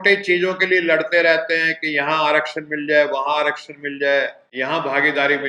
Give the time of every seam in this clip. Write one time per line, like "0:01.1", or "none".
0:04.4